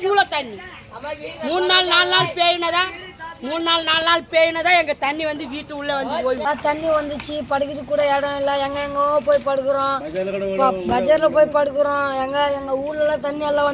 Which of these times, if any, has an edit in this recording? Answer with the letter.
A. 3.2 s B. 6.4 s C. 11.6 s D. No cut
B